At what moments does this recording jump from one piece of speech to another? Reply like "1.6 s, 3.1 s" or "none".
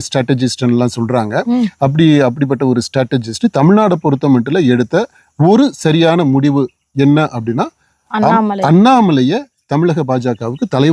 none